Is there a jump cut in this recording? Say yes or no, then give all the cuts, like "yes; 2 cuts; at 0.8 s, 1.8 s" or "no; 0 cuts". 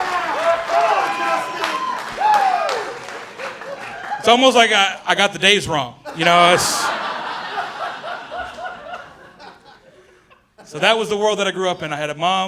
yes; 1 cut; at 9.7 s